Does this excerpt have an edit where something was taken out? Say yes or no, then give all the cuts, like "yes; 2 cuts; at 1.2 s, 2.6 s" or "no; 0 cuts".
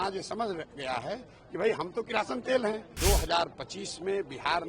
yes; 1 cut; at 2.9 s